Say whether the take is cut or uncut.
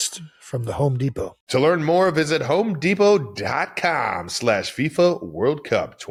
uncut